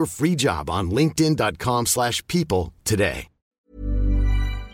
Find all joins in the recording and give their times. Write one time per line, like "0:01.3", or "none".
0:03.5